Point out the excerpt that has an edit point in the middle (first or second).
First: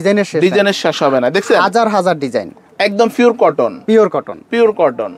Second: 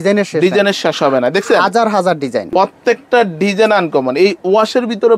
second